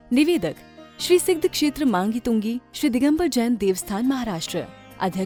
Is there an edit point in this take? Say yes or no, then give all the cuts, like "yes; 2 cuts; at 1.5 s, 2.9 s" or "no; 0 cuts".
no; 0 cuts